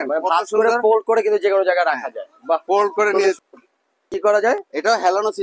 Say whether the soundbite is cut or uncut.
cut